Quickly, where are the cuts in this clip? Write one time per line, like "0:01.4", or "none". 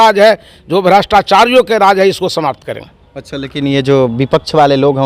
none